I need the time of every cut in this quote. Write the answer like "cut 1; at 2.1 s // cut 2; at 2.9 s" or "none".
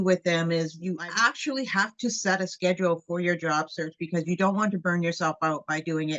cut 1; at 0.9 s